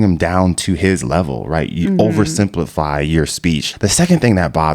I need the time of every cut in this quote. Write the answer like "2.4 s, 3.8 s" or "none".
3.7 s